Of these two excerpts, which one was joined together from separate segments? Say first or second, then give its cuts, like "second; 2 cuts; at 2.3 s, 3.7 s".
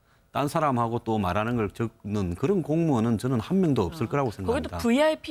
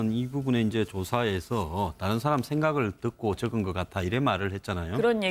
second; 1 cut; at 1.2 s